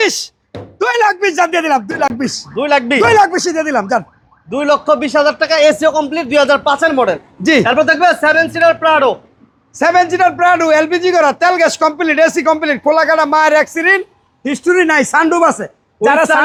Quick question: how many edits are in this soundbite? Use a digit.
0